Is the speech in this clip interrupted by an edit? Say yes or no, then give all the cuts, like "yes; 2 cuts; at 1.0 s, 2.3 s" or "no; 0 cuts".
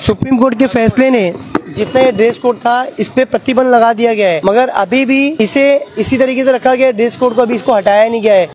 yes; 2 cuts; at 4.4 s, 5.3 s